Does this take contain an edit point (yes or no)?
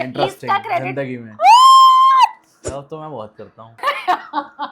yes